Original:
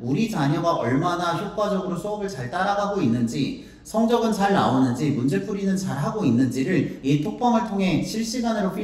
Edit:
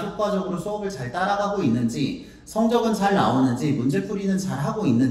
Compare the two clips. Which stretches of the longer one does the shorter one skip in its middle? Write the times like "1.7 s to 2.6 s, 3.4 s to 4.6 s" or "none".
none